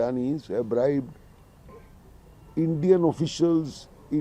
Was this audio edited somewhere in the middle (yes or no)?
no